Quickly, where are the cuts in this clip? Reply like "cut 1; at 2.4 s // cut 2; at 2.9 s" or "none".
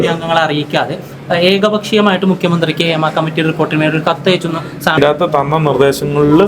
cut 1; at 4.9 s